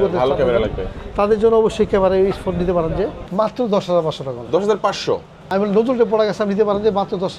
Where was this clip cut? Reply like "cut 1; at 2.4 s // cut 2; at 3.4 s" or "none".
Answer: cut 1; at 3.3 s // cut 2; at 5.3 s